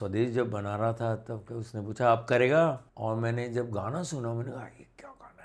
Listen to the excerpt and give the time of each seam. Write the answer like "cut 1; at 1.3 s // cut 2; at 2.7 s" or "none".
cut 1; at 2.9 s